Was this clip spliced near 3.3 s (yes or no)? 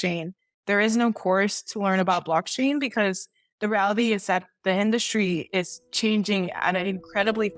no